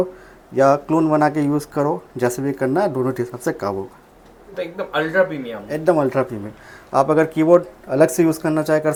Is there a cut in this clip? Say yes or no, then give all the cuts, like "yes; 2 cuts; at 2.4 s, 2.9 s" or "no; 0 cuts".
no; 0 cuts